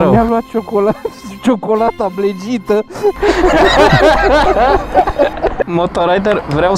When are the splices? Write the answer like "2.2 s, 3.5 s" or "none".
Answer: 5.7 s